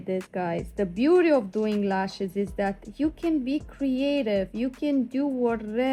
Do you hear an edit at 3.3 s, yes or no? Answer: no